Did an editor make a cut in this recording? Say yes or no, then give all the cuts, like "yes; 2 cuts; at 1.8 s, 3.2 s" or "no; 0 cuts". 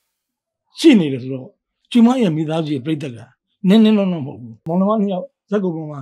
yes; 1 cut; at 4.7 s